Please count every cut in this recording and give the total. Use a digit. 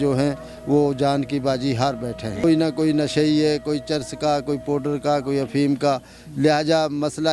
1